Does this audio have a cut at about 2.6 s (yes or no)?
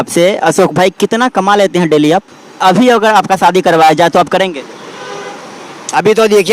yes